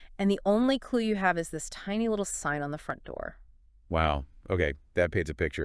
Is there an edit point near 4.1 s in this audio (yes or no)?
yes